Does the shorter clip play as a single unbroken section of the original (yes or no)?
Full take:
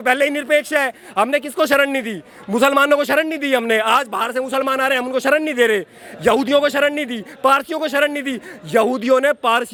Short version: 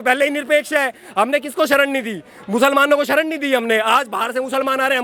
yes